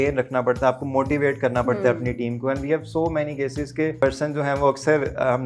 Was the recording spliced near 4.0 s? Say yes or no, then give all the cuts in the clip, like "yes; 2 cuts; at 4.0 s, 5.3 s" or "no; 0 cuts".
yes; 1 cut; at 4.0 s